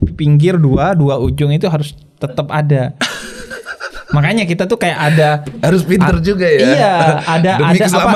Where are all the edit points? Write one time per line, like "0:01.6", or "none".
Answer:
none